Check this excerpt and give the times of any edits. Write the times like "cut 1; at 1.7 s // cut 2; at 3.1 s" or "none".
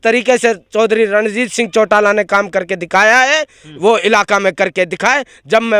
none